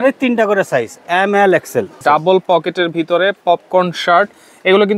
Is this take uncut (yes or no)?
no